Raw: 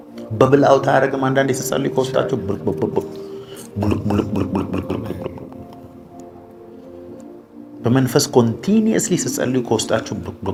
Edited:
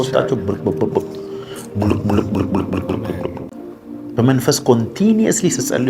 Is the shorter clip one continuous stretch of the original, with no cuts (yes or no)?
no